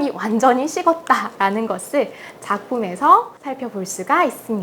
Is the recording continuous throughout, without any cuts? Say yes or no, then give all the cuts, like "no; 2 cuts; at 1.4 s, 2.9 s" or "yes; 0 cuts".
no; 1 cut; at 3.4 s